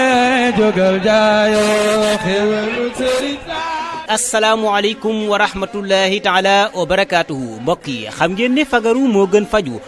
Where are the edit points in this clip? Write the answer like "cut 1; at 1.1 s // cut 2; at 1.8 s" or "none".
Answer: cut 1; at 3.1 s